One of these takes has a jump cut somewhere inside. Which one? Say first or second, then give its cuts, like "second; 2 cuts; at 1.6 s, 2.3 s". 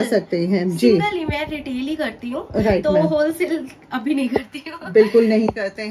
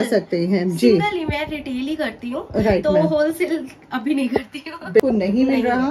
second; 1 cut; at 5.0 s